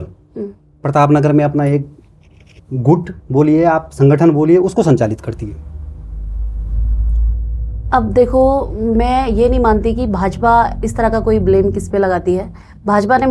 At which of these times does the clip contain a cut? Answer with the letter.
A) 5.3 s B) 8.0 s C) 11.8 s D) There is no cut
D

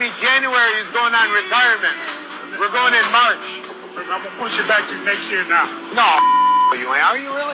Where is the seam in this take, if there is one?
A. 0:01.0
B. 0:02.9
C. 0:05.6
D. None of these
D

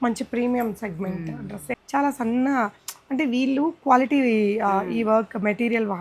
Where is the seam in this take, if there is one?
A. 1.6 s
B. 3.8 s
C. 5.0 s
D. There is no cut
A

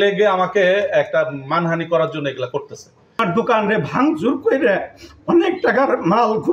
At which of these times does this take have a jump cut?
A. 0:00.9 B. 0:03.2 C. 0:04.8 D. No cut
B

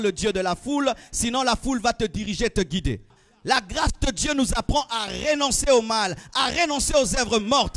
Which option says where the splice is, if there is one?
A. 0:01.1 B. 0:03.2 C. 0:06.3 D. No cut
B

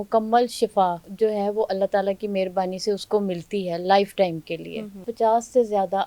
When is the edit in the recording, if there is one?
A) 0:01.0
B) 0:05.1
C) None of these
B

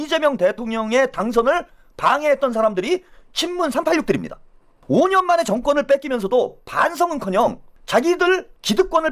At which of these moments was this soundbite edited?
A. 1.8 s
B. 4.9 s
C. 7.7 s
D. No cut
C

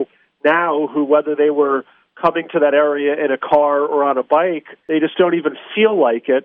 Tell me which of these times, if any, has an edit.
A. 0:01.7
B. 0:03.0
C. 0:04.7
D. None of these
D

